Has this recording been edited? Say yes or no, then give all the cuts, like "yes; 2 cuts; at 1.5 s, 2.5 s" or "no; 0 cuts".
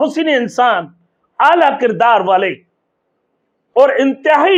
no; 0 cuts